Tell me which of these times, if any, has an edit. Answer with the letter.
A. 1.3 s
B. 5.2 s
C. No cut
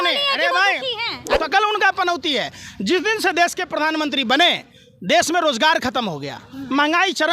A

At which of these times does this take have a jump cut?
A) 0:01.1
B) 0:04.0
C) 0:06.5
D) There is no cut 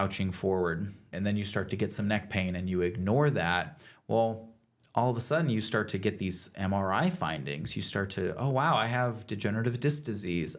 A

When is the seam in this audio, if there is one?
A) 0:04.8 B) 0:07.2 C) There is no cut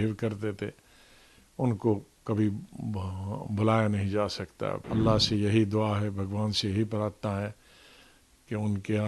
A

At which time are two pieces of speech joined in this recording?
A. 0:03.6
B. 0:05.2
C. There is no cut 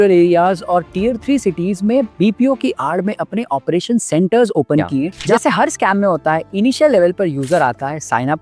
B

